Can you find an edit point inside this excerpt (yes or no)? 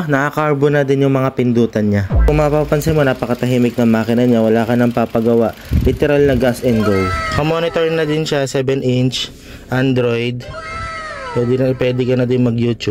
yes